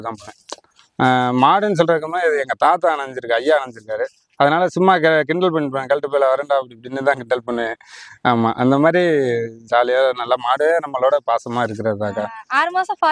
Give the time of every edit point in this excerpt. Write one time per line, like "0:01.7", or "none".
none